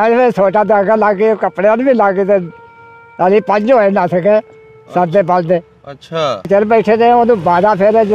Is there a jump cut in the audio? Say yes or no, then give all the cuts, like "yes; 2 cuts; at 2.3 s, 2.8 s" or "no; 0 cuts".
yes; 1 cut; at 6.5 s